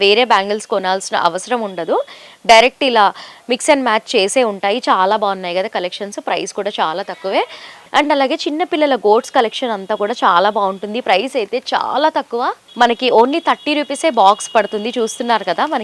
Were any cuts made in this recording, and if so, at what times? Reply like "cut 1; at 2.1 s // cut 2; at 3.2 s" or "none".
none